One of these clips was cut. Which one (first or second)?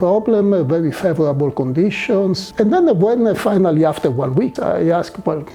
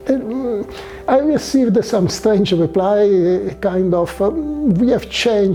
first